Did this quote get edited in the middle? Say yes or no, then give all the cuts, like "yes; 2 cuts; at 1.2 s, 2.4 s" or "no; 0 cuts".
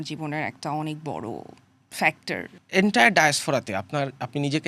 yes; 1 cut; at 2.6 s